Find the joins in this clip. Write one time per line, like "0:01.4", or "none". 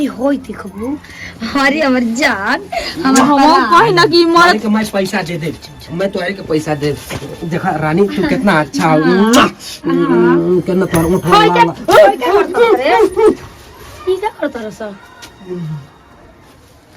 none